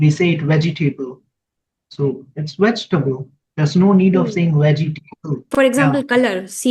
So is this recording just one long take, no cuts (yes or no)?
no